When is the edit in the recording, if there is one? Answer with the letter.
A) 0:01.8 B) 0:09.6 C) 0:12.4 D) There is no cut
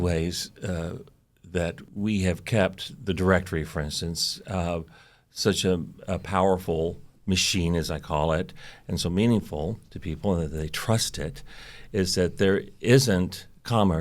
A